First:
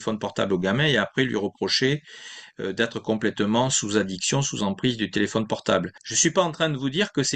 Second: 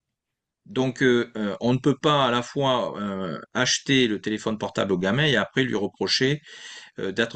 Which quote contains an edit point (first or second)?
first